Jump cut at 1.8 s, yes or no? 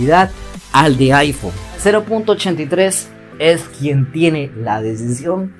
yes